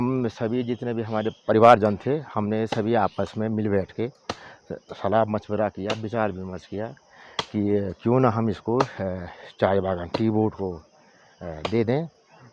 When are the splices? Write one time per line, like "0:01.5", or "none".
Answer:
none

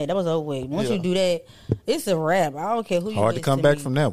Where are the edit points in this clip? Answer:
none

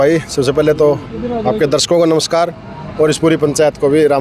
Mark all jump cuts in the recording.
none

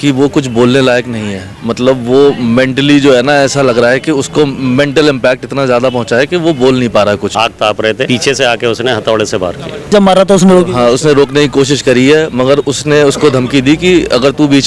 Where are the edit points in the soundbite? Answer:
0:07.7
0:09.9

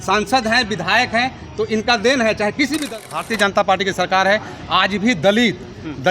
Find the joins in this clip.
0:03.1

